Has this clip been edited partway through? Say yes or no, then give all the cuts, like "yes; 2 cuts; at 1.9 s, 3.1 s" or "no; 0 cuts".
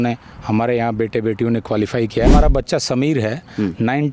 yes; 1 cut; at 2.3 s